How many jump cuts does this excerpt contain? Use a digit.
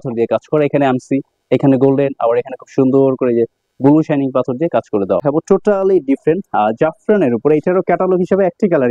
1